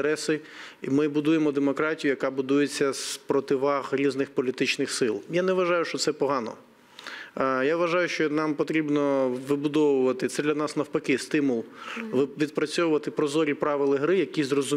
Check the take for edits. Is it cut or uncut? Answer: uncut